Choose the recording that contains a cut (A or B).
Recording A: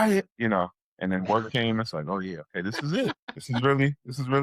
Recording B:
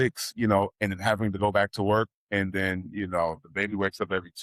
A